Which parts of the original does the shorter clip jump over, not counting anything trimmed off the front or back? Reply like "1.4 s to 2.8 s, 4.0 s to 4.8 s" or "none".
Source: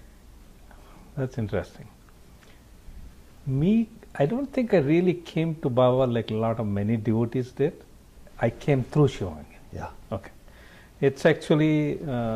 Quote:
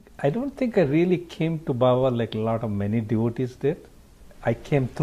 none